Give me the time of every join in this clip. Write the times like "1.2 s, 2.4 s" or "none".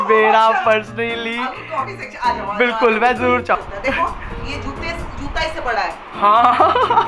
3.6 s